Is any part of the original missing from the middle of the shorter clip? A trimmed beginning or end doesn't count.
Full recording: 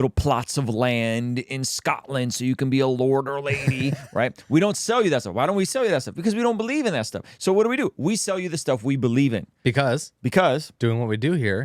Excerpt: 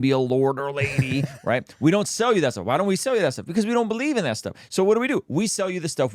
no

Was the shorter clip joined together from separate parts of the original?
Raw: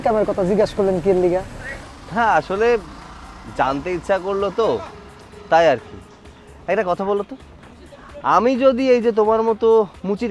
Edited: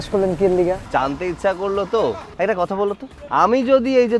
yes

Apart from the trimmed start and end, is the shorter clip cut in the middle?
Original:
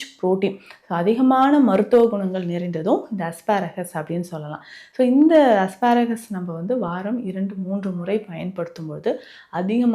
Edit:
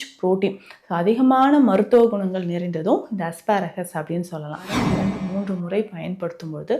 yes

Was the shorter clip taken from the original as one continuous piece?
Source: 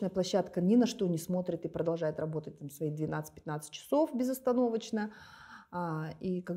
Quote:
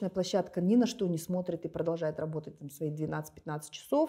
yes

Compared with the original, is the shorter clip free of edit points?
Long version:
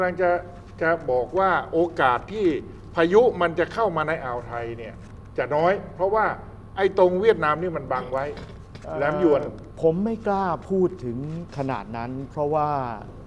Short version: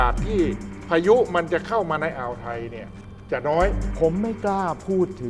no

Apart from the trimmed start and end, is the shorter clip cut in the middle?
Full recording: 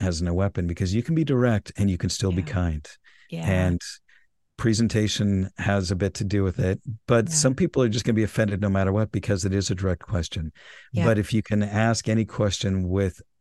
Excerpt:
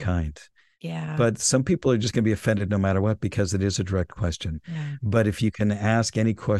yes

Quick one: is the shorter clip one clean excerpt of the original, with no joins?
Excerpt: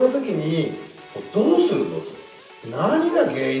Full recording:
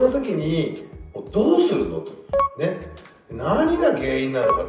no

